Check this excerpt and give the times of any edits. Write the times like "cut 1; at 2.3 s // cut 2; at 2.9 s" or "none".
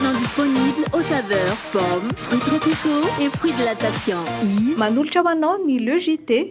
none